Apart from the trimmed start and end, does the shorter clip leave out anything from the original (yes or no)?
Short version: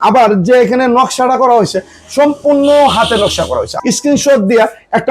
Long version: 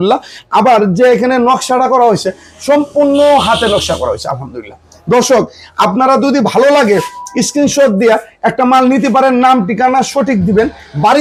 yes